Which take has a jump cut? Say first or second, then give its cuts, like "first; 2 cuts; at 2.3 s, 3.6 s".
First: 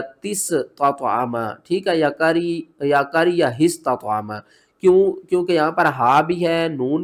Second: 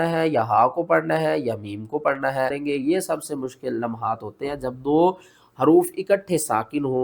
second; 1 cut; at 2.6 s